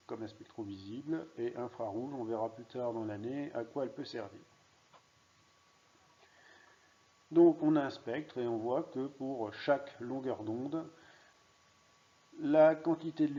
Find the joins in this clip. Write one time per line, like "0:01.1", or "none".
none

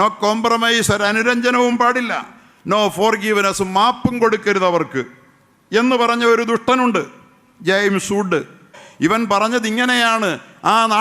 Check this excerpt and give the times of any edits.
0:08.8

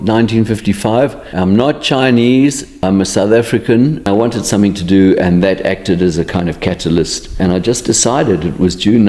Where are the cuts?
0:01.2
0:02.7
0:04.1
0:07.2

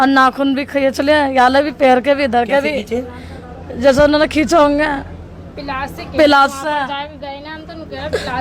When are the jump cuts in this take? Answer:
none

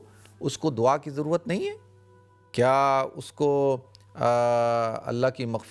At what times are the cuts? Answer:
none

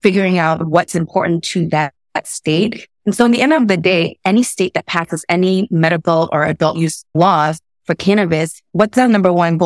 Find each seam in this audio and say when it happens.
0:07.0
0:08.6

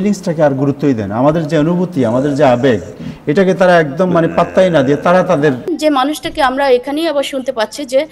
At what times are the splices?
0:05.7

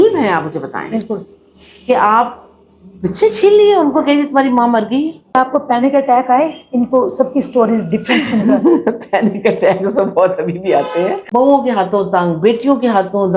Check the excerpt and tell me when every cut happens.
0:05.3
0:11.2

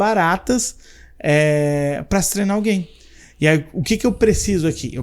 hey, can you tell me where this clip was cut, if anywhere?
none

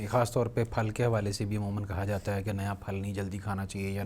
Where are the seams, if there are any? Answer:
none

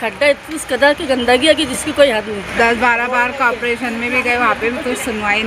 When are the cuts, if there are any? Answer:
0:02.4

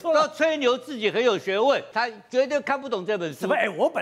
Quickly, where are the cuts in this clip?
0:01.9

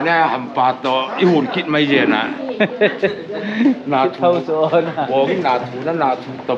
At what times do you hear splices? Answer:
none

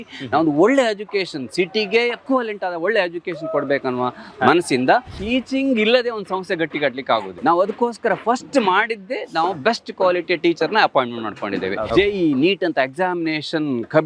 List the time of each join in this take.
0:02.2
0:05.2
0:07.4
0:11.8

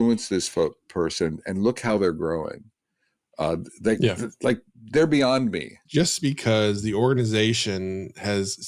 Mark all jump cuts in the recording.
0:05.8

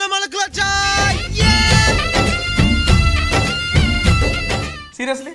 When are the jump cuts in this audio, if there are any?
none

